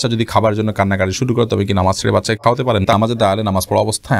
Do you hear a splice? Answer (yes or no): yes